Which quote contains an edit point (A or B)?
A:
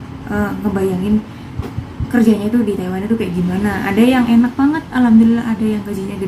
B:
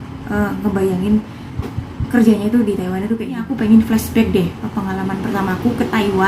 B